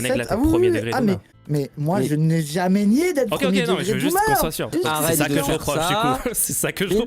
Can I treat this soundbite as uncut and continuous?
no; 2 cuts; at 1.3 s, 4.7 s

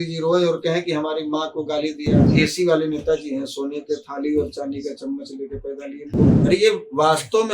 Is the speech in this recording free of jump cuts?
no; 2 cuts; at 2.3 s, 6.3 s

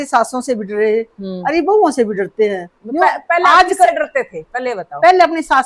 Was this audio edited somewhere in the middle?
no; 0 cuts

